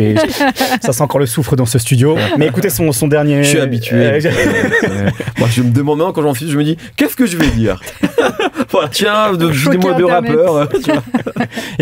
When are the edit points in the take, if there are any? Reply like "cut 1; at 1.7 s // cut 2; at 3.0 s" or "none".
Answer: cut 1; at 8.9 s

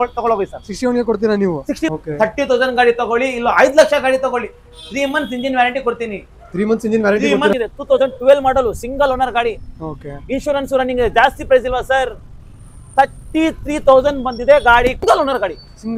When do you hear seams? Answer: cut 1; at 1.9 s // cut 2; at 7.5 s // cut 3; at 15.0 s

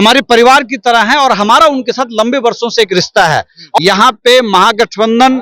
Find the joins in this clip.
cut 1; at 3.8 s

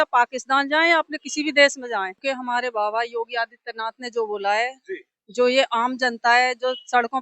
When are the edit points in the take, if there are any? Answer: cut 1; at 2.2 s

